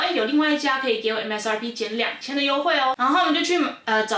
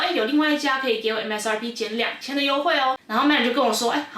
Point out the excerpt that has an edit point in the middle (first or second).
second